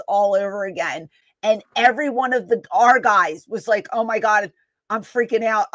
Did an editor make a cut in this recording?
no; 0 cuts

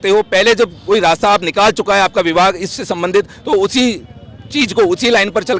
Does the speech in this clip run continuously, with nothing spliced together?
yes; 0 cuts

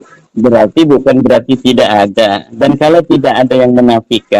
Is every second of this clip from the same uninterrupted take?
yes; 0 cuts

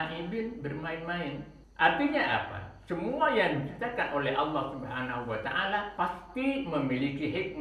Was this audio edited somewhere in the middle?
yes; 2 cuts; at 1.6 s, 5.9 s

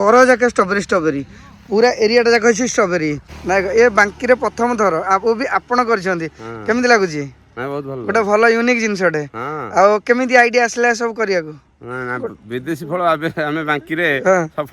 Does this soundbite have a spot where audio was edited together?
yes; 1 cut; at 3.3 s

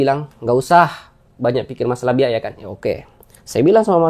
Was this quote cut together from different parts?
no; 0 cuts

